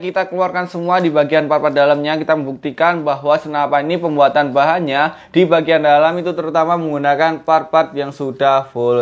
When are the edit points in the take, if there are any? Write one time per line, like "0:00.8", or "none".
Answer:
none